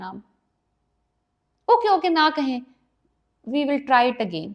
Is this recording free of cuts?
yes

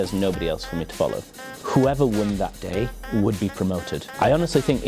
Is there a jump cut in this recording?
yes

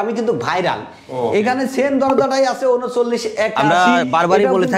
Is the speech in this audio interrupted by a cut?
no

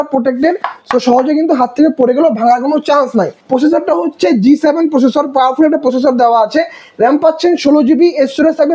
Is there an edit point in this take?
yes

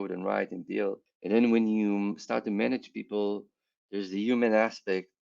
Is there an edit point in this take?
yes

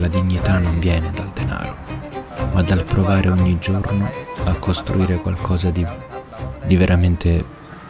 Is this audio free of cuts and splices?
yes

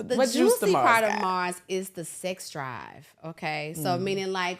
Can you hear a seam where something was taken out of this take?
no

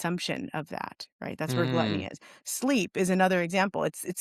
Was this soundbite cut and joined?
no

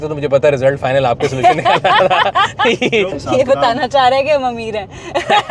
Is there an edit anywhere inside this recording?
yes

